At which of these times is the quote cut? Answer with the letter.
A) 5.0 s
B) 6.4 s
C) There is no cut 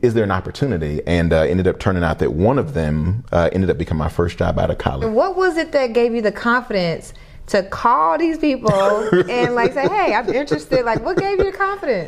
A